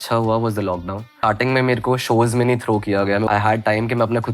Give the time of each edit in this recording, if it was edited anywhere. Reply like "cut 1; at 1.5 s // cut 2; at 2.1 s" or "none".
cut 1; at 1.1 s // cut 2; at 3.3 s